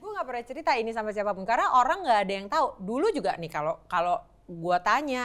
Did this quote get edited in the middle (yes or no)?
no